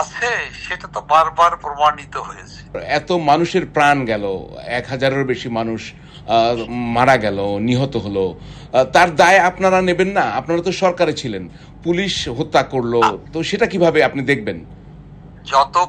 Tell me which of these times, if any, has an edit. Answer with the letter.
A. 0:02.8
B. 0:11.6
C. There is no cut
A